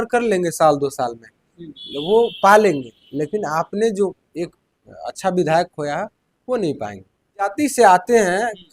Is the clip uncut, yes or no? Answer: no